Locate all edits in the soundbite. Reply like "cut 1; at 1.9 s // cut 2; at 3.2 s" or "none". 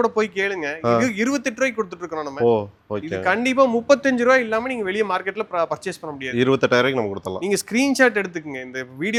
none

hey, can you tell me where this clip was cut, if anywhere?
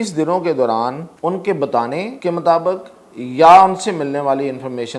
cut 1; at 1.1 s // cut 2; at 2.1 s

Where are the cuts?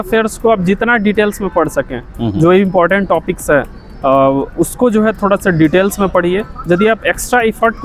none

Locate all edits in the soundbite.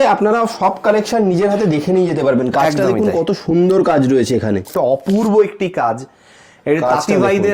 cut 1; at 4.7 s

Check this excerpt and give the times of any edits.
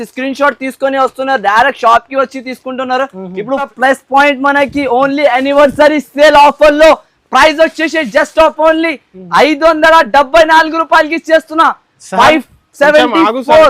cut 1; at 3.7 s

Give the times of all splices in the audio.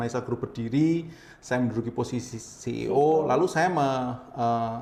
none

